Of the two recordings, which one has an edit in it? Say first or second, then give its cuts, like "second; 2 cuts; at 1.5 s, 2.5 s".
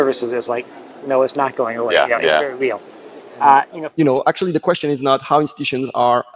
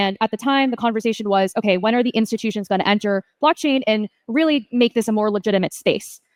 first; 1 cut; at 3.8 s